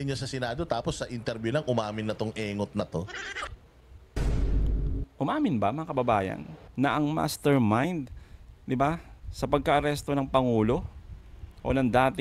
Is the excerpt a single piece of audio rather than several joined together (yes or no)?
yes